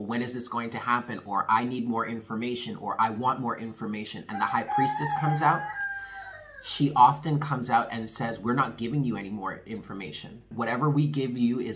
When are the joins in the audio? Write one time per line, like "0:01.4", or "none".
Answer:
0:10.4